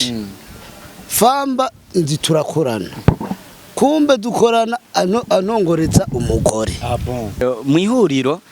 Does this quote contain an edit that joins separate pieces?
yes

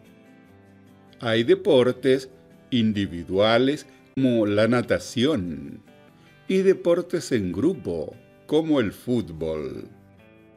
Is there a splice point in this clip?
yes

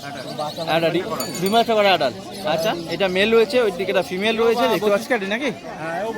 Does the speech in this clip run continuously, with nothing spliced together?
no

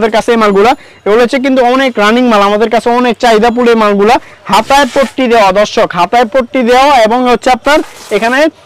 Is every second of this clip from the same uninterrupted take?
yes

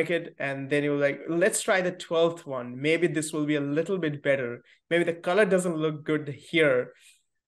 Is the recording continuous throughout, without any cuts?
yes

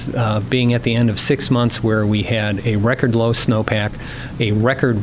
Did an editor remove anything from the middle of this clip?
no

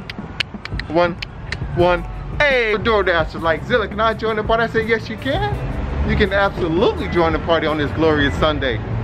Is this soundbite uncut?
no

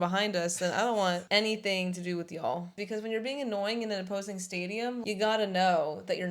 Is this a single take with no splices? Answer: no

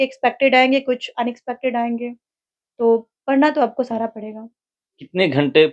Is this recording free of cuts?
yes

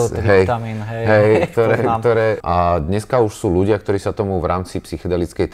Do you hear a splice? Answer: yes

